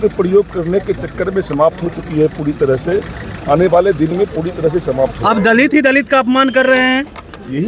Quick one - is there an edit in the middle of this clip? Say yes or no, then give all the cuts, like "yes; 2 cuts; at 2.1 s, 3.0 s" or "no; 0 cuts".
no; 0 cuts